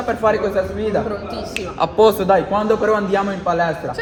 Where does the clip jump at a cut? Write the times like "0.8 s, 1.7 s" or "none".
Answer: none